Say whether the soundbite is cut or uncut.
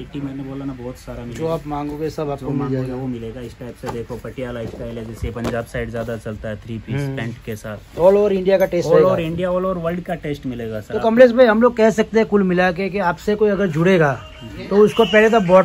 uncut